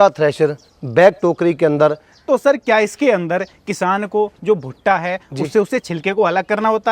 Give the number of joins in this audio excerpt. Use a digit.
1